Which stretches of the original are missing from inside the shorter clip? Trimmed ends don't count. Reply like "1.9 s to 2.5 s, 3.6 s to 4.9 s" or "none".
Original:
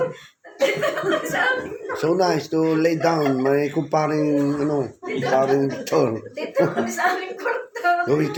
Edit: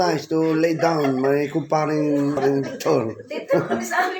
4.6 s to 5.4 s